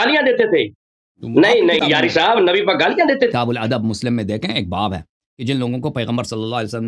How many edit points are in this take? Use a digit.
1